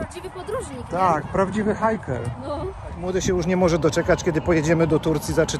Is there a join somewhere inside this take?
no; 0 cuts

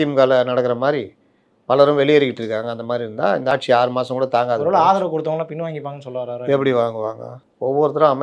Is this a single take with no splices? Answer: no; 1 cut; at 3.5 s

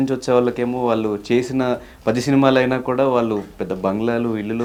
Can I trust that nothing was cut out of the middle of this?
yes; 0 cuts

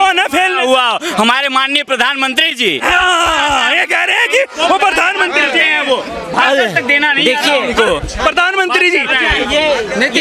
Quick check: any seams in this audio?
no; 0 cuts

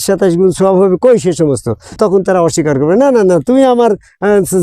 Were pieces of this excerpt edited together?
yes; 1 cut; at 1.9 s

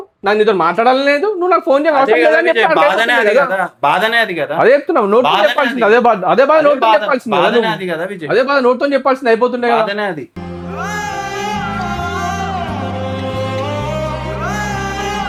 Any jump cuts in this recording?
no; 0 cuts

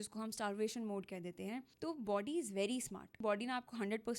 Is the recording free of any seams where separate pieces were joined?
no; 2 cuts; at 1.7 s, 3.1 s

